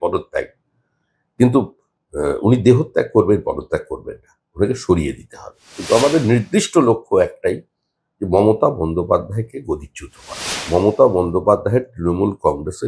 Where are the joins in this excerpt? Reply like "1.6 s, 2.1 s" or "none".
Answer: 5.7 s, 10.6 s

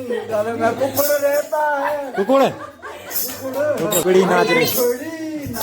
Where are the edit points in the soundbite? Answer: 4.0 s

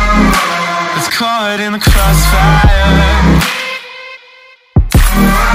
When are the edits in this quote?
0.9 s

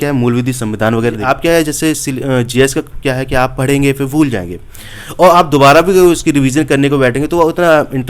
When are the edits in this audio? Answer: 1.2 s

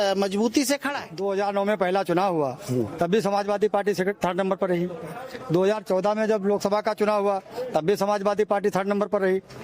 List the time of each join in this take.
1.1 s

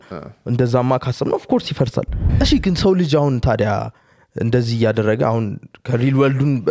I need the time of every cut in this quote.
2.2 s

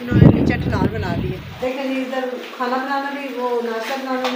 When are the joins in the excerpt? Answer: 1.5 s

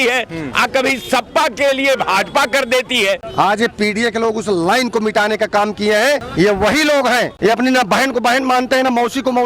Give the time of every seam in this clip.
3.2 s, 6.3 s, 7.3 s

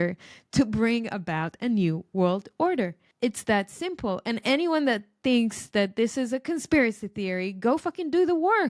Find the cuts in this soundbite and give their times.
3.0 s

